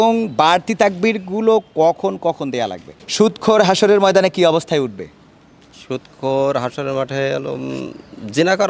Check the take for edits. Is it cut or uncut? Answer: cut